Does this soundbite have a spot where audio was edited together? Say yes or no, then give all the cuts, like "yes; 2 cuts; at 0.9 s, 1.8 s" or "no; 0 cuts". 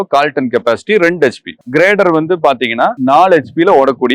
yes; 2 cuts; at 1.5 s, 3.0 s